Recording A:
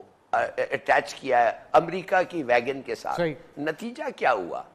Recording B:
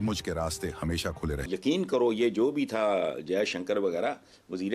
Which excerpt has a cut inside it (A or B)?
B